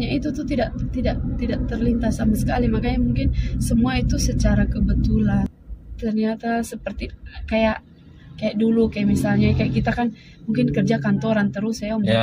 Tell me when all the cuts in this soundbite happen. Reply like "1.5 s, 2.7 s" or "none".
5.5 s